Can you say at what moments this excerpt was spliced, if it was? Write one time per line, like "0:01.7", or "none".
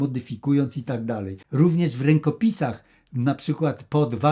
0:01.4